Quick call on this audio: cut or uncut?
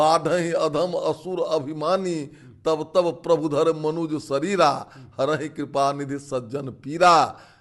uncut